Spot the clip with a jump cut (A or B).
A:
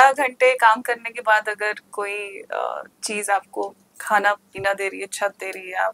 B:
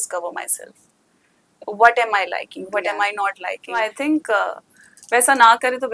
B